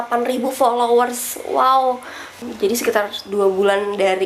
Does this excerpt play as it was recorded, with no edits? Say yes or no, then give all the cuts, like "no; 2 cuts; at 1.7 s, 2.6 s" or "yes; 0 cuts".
no; 1 cut; at 2.4 s